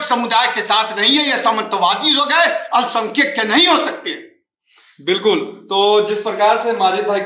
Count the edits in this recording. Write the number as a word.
zero